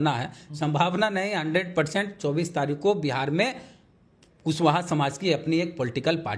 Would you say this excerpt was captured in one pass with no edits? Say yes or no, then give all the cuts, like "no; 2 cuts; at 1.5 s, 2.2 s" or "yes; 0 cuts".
yes; 0 cuts